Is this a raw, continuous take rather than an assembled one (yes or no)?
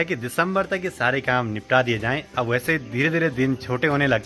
yes